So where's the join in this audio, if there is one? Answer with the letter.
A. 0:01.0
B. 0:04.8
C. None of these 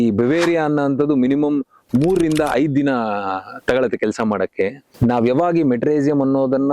B